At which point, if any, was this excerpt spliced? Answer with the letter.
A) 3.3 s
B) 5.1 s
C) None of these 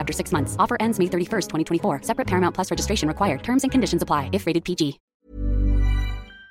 B